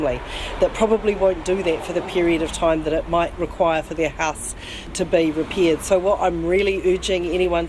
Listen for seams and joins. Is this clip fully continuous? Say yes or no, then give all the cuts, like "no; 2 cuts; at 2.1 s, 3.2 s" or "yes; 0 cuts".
no; 1 cut; at 4.9 s